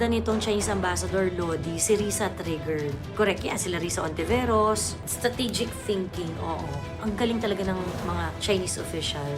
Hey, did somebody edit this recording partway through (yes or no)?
yes